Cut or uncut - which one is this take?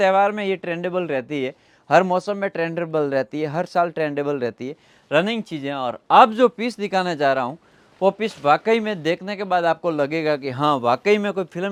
uncut